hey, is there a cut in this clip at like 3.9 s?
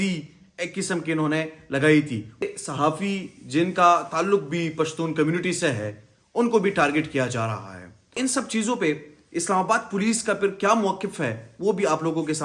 no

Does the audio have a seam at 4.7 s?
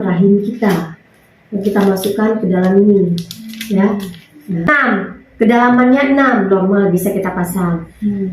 yes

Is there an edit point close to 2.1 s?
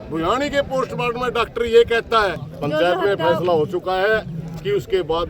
yes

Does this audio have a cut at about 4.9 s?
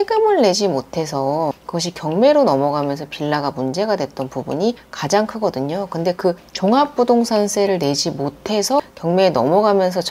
no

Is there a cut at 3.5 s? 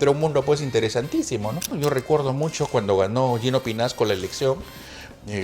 no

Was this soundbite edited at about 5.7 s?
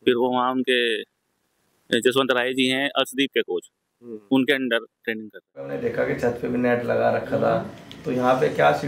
yes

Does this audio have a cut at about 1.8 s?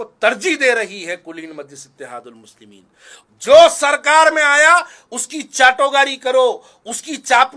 no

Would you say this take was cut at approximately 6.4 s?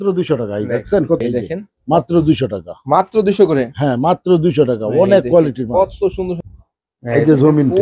yes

